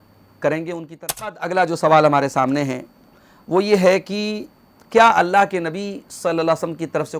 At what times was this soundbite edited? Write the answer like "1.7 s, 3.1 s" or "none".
1.4 s